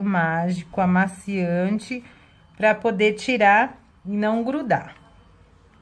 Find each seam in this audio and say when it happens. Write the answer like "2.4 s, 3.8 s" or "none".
3.4 s